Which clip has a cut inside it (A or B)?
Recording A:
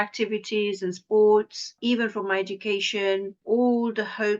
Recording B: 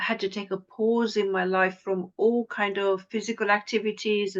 A